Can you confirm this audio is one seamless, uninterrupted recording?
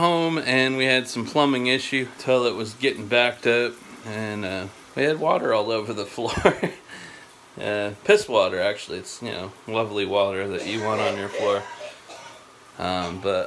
no; 2 cuts; at 2.1 s, 4.8 s

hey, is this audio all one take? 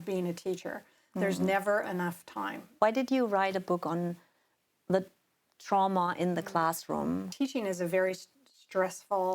no; 2 cuts; at 2.6 s, 7.3 s

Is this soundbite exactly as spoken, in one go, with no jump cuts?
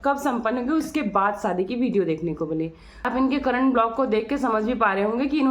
no; 1 cut; at 3.1 s

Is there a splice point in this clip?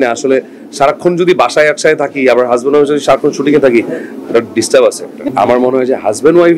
yes; 1 cut; at 5.3 s

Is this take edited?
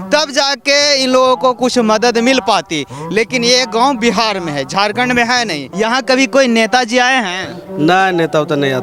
yes; 1 cut; at 5.6 s

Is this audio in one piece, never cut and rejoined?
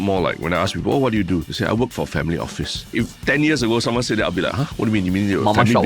no; 2 cuts; at 1.5 s, 2.9 s

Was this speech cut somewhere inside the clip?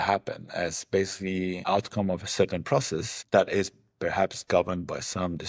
no; 0 cuts

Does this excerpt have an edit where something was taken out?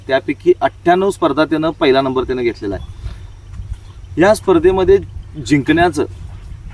no; 0 cuts

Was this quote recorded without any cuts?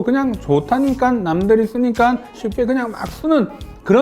no; 1 cut; at 2.3 s

